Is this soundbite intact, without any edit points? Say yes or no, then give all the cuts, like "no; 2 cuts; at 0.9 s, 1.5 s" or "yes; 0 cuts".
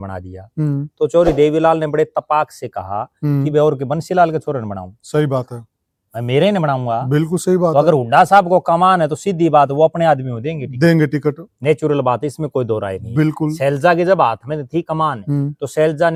yes; 0 cuts